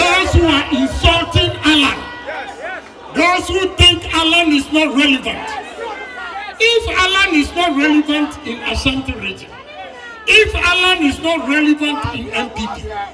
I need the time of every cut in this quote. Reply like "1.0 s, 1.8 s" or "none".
none